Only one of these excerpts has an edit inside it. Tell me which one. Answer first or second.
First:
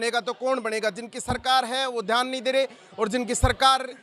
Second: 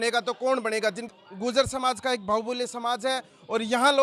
second